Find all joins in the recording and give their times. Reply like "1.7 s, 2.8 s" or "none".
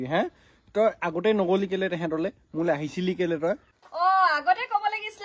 3.7 s